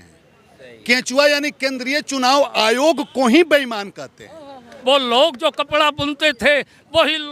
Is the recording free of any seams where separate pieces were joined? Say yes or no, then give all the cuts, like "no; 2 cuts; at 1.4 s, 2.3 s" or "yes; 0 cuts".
no; 1 cut; at 4.7 s